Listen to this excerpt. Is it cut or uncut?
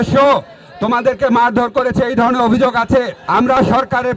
cut